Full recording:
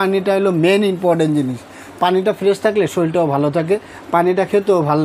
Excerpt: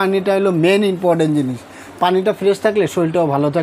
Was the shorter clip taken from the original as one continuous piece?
yes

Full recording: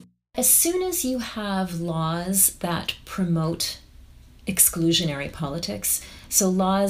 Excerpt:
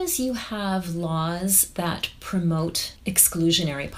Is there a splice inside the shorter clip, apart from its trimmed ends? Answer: yes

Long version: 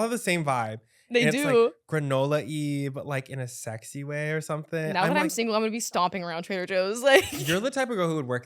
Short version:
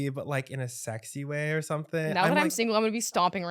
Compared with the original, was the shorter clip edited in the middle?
no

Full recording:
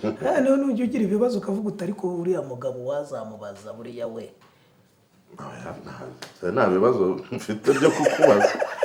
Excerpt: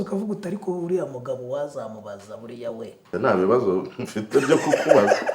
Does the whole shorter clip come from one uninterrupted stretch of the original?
no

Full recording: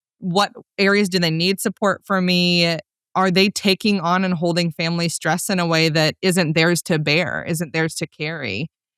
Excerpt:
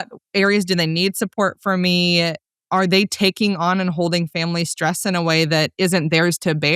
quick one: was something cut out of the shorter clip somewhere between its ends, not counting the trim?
no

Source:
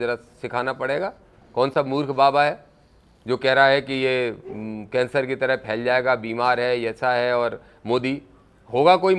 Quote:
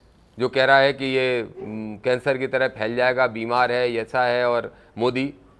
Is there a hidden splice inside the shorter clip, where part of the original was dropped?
no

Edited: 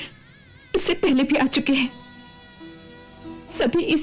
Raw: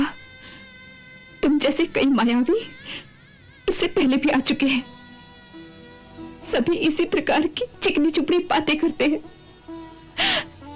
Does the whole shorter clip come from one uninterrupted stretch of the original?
yes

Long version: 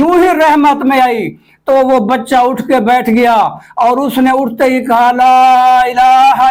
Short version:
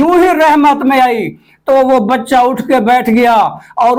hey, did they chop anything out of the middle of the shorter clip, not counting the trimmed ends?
no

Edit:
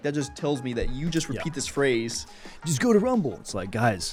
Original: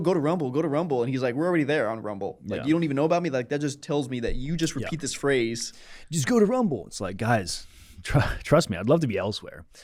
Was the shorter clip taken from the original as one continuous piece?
yes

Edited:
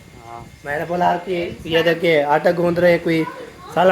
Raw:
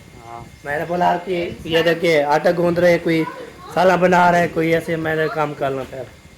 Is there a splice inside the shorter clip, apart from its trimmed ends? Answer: no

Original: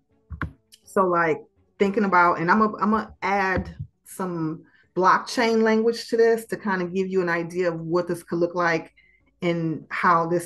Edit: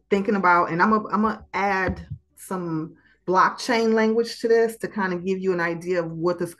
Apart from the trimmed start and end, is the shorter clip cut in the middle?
no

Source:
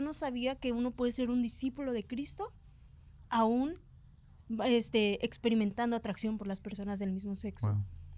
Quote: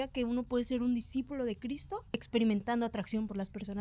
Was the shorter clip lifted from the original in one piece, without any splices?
no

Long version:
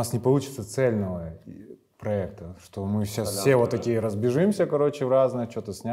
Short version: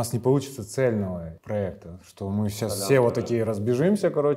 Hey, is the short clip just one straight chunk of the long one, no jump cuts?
no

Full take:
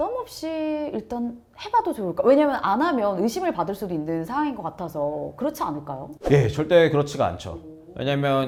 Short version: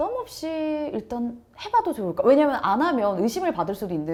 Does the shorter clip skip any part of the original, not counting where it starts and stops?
no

